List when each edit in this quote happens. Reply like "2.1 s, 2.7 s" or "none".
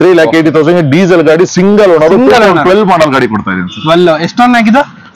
none